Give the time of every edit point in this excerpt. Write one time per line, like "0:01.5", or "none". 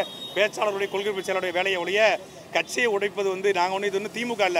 none